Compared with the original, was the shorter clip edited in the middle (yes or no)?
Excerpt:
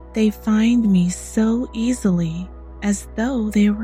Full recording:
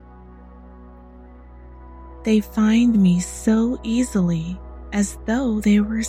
no